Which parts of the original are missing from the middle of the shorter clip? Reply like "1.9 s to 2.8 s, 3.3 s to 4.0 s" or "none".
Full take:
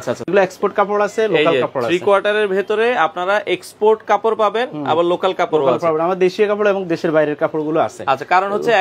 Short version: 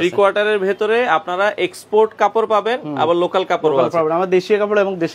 none